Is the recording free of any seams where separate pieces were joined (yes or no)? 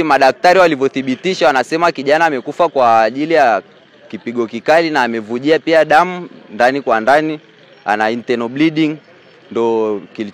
yes